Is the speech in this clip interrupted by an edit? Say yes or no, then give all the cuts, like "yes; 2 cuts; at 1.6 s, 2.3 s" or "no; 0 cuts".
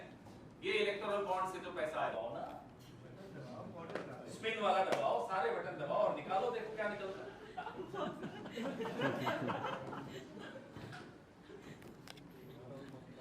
yes; 1 cut; at 2.1 s